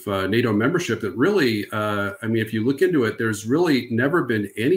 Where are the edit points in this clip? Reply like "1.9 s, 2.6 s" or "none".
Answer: none

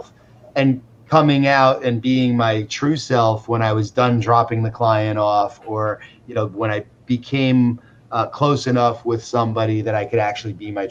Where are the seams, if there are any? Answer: none

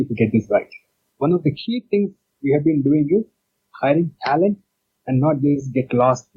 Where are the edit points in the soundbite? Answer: 1.1 s

